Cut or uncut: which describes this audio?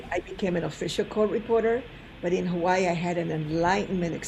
uncut